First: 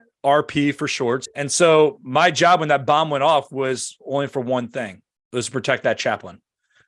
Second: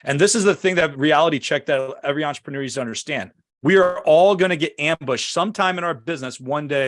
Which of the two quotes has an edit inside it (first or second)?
first